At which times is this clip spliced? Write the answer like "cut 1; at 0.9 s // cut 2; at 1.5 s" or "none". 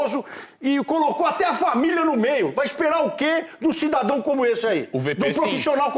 none